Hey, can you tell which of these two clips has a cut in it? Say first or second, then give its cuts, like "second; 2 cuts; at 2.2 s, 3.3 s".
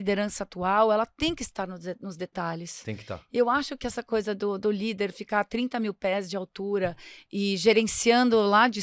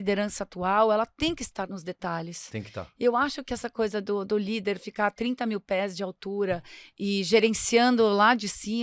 second; 1 cut; at 1.7 s